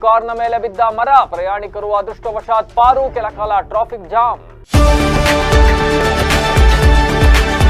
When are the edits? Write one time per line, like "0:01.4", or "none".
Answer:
0:04.5